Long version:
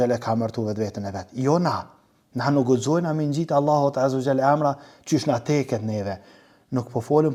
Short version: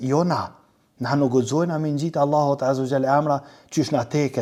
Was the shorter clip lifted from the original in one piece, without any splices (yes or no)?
yes